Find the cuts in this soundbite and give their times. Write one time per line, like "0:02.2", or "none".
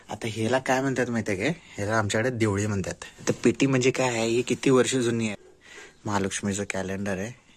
0:03.0
0:05.3